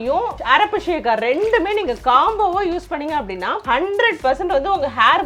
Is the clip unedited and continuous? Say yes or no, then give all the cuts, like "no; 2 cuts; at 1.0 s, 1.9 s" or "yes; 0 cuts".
yes; 0 cuts